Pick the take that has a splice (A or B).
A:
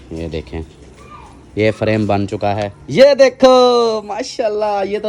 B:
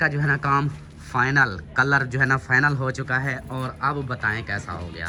A